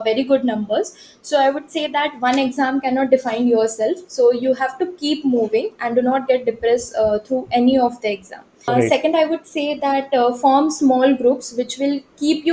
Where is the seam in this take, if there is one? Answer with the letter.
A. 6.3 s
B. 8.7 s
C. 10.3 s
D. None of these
B